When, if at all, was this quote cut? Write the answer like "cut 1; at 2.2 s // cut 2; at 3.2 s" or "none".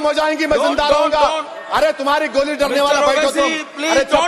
none